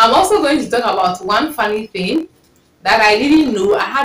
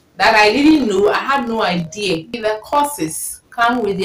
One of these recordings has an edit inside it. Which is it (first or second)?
second